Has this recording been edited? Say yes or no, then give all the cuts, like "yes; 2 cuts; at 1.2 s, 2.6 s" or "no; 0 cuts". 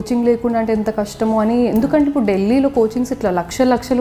no; 0 cuts